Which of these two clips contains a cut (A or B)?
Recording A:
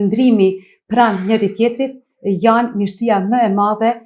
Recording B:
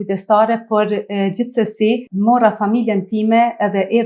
B